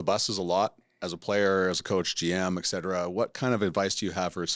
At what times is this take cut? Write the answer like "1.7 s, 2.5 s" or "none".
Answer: none